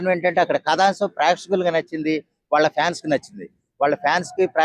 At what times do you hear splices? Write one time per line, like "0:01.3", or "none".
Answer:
none